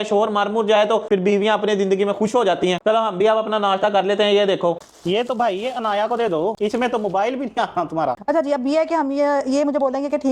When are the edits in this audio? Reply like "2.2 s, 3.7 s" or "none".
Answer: 4.8 s, 8.2 s